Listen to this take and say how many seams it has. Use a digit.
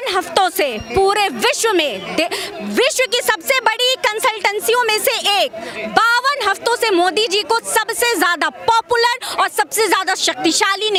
0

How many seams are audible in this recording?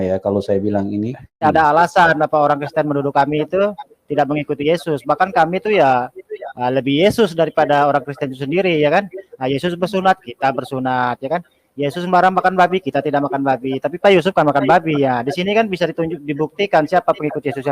1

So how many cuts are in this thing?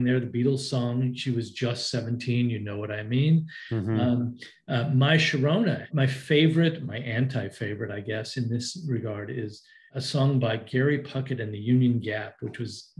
1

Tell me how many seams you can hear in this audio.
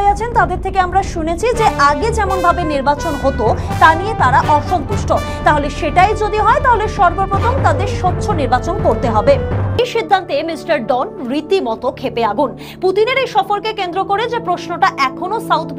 1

